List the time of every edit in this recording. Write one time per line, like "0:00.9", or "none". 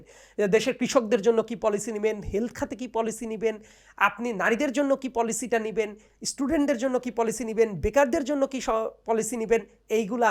none